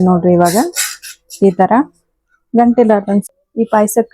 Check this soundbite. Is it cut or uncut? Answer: cut